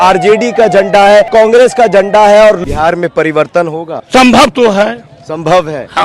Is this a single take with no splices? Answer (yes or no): no